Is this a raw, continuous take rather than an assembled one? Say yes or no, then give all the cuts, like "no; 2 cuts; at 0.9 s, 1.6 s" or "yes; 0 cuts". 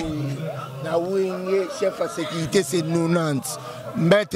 yes; 0 cuts